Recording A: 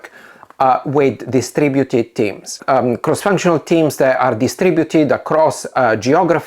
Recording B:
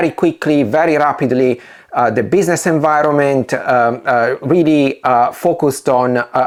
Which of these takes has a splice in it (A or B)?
A